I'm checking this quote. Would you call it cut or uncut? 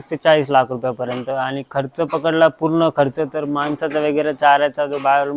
uncut